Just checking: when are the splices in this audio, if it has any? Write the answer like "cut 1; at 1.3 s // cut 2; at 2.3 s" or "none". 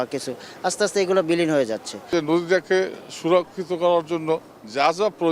cut 1; at 2.1 s